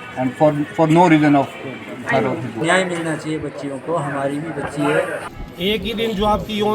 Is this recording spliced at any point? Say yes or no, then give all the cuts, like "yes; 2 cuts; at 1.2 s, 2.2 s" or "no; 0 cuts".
yes; 2 cuts; at 2.6 s, 5.3 s